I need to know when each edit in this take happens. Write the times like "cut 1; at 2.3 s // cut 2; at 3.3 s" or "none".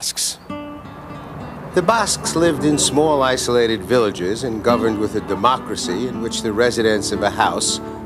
cut 1; at 4.5 s

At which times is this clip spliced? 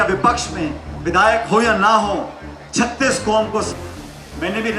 cut 1; at 3.7 s

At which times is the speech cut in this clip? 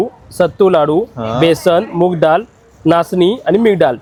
none

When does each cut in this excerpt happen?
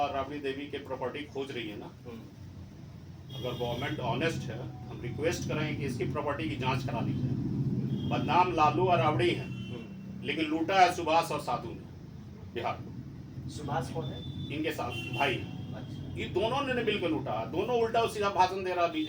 none

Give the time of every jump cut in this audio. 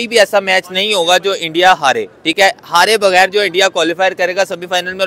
none

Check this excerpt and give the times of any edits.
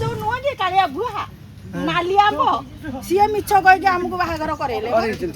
none

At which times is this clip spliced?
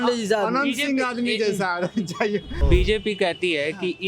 cut 1; at 2.6 s

